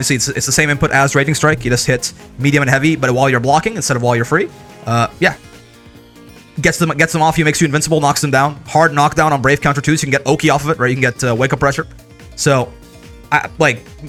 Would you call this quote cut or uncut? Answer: uncut